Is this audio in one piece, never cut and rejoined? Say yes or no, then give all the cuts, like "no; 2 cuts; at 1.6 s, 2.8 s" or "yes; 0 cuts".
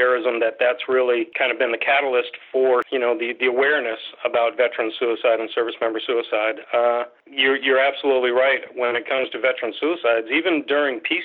no; 3 cuts; at 1.3 s, 2.9 s, 7.2 s